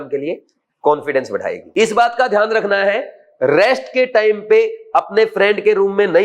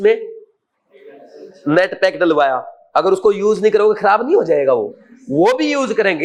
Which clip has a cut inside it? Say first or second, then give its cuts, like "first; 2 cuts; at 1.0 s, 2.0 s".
first; 1 cut; at 1.6 s